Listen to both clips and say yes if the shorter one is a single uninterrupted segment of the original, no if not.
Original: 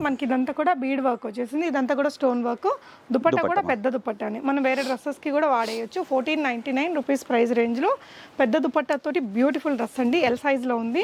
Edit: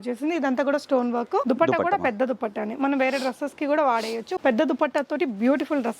no